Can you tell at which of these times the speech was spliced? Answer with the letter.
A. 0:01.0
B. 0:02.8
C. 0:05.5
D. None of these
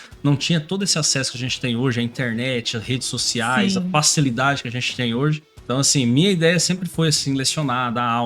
C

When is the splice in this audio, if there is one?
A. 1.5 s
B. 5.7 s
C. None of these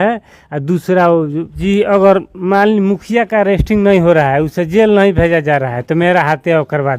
A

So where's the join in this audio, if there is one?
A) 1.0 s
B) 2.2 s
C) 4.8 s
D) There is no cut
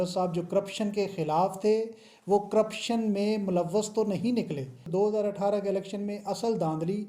C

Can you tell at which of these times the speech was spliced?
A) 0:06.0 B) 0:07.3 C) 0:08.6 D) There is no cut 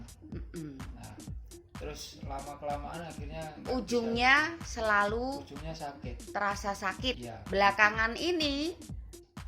B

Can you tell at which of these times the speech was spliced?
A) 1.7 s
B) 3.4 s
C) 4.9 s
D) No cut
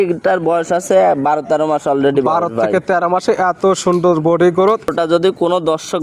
C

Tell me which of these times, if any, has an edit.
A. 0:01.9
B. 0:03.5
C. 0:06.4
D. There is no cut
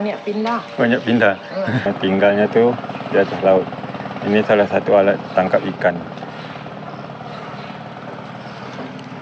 A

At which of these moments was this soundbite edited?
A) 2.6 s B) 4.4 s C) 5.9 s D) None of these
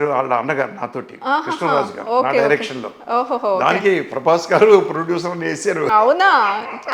C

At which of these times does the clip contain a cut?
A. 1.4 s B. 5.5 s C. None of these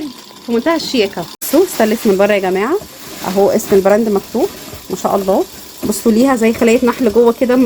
A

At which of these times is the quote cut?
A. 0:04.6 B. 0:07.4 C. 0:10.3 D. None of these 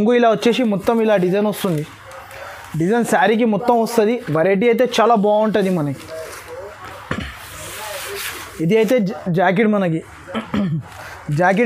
D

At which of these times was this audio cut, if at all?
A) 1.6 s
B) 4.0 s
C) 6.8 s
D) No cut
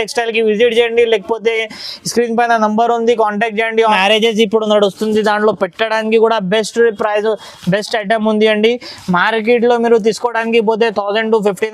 B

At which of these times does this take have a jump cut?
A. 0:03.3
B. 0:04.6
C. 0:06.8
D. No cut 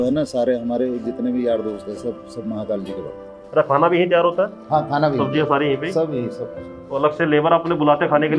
A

